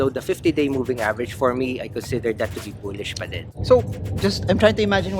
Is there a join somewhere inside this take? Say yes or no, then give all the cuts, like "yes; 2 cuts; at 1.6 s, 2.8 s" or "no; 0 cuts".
no; 0 cuts